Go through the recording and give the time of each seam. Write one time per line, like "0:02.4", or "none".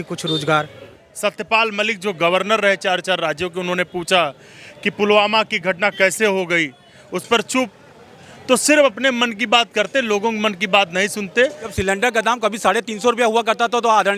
0:01.0
0:11.7